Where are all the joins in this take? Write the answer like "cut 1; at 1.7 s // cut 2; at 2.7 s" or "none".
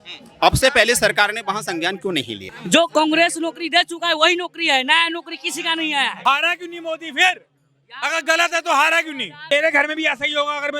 cut 1; at 2.6 s // cut 2; at 6.2 s // cut 3; at 9.4 s